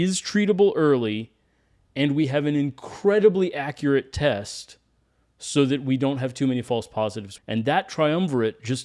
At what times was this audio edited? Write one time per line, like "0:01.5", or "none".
0:07.3